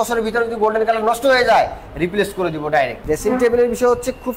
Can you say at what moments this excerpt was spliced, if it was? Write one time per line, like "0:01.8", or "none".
0:03.0